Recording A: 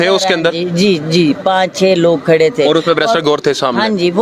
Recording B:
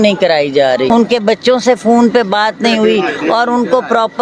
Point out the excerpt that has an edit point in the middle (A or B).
B